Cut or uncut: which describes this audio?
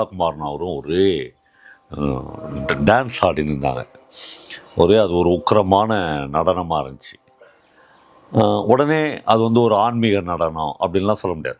uncut